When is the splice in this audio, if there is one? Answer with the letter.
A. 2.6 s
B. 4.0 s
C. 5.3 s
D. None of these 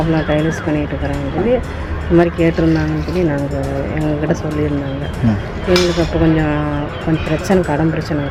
D